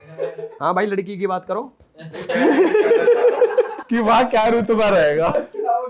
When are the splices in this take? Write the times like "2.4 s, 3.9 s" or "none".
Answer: none